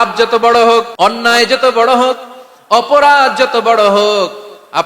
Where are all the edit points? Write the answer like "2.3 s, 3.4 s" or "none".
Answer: 0.9 s